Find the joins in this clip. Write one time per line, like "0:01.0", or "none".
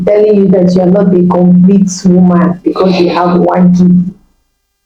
none